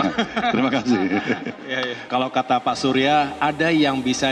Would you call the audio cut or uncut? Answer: cut